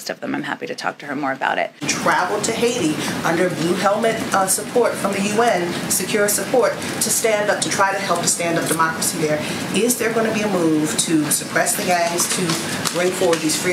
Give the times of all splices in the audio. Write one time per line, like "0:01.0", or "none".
0:01.8